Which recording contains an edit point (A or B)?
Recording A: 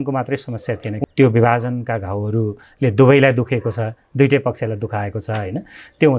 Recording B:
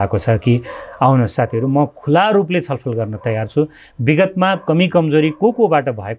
A